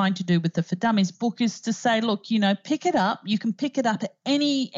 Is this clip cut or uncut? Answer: cut